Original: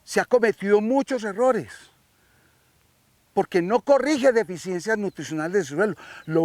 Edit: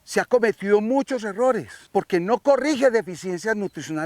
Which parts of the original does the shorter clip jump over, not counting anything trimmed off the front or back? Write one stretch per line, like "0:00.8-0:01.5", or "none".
0:01.7-0:03.2